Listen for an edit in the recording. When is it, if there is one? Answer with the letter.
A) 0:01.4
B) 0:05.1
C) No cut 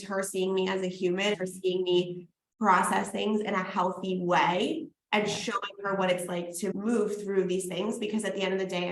A